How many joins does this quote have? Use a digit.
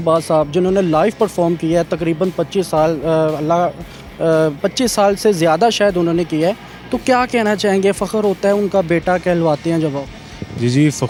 0